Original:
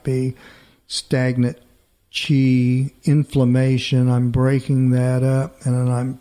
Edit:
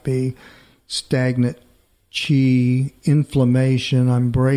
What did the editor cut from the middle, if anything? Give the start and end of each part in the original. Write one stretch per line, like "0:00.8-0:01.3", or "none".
none